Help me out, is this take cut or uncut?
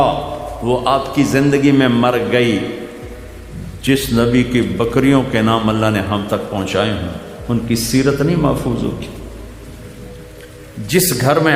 uncut